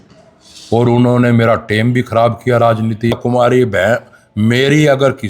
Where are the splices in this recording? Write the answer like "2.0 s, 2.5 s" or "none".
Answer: 3.1 s

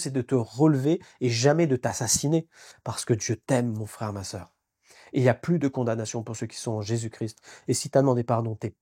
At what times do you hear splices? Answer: 2.7 s

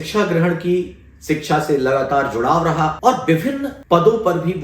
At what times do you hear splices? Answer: 3.0 s, 3.7 s

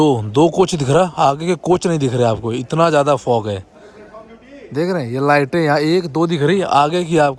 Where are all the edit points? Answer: none

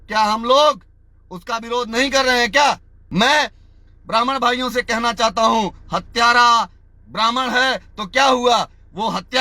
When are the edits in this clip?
2.9 s

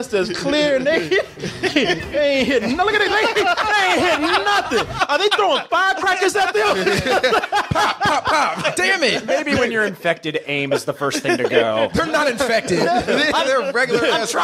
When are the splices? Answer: none

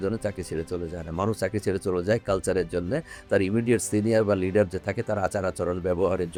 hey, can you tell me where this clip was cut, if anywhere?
none

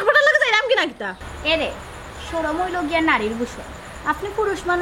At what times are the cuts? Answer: 1.1 s

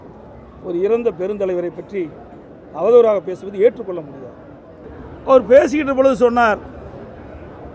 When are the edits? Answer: 4.8 s

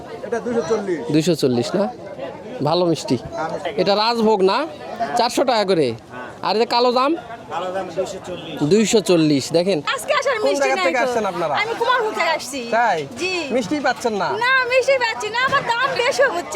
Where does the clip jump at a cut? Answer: 3.7 s, 9.9 s

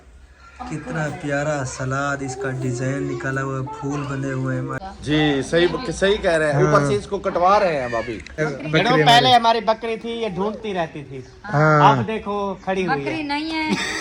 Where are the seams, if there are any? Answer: 4.8 s, 8.5 s

